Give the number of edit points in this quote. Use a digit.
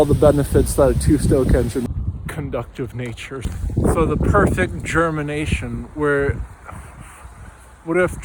2